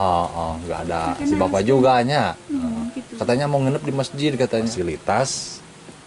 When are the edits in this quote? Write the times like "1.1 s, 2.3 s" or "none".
4.7 s